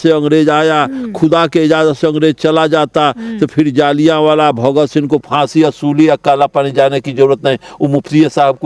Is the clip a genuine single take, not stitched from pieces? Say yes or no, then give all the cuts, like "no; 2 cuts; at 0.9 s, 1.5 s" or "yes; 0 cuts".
yes; 0 cuts